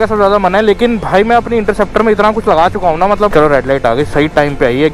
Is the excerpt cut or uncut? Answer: cut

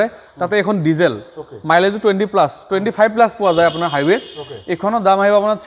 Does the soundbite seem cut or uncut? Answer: uncut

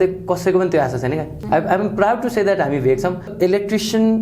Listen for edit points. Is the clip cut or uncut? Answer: cut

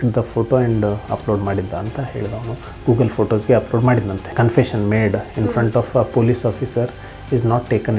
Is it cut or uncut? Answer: cut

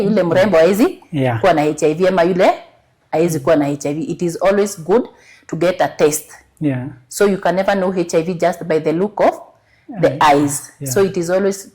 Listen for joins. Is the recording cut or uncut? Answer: uncut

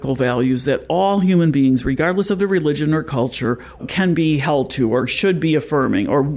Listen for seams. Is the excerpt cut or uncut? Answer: cut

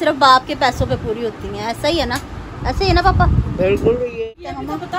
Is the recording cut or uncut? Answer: cut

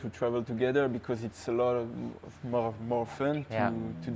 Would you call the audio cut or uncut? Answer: uncut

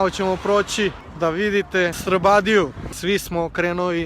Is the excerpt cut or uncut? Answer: cut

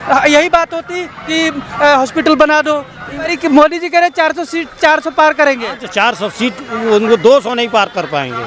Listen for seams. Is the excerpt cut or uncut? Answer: cut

